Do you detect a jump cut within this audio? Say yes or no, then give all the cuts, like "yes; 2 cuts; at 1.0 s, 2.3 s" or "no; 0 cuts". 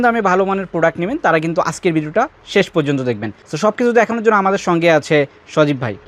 no; 0 cuts